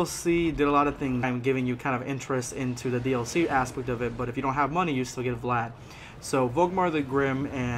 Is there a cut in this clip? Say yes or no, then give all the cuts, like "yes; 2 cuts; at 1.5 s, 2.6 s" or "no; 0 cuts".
no; 0 cuts